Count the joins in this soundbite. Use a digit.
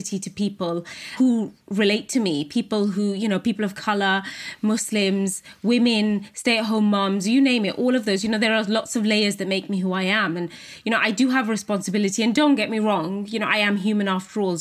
1